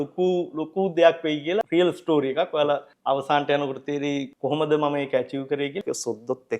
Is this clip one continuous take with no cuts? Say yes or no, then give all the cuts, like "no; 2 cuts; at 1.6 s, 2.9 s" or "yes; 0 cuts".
no; 4 cuts; at 1.7 s, 2.9 s, 4.3 s, 5.8 s